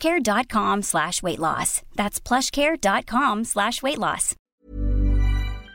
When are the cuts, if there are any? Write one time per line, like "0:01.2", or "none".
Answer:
0:04.5